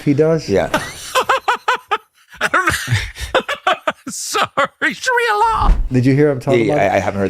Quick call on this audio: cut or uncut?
uncut